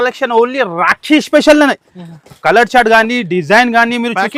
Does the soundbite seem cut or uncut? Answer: uncut